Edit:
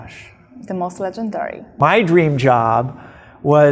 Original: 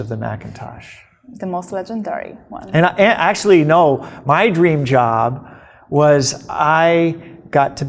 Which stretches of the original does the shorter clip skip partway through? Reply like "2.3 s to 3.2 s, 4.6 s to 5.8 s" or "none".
2.4 s to 4.1 s